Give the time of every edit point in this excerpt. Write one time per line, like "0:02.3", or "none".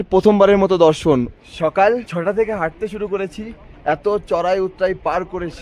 0:01.3
0:02.1